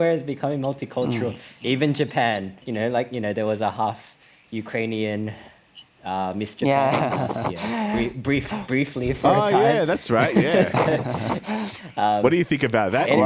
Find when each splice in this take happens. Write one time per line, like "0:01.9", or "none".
0:02.6